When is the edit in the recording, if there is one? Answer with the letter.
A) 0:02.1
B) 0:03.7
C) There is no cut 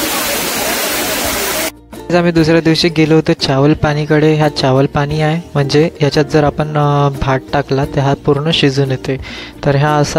A